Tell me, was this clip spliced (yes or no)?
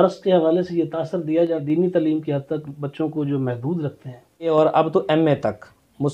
yes